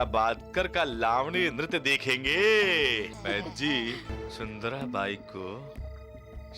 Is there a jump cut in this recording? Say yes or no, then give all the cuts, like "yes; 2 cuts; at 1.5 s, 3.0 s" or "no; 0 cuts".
yes; 2 cuts; at 3.1 s, 4.2 s